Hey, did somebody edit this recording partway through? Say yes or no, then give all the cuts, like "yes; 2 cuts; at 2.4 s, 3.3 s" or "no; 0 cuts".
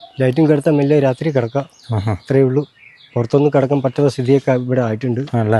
no; 0 cuts